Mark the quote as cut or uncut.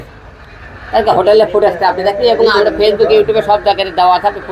uncut